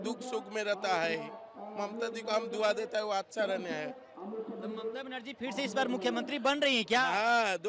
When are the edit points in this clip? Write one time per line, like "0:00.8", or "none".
none